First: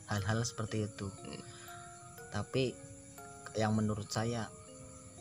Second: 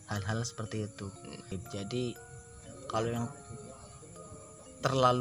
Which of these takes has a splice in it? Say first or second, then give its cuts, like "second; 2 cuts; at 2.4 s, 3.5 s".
second; 1 cut; at 1.5 s